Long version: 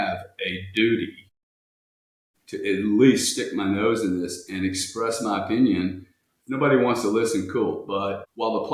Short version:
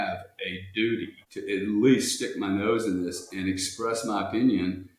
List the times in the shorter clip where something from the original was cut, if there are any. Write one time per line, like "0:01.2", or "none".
0:01.2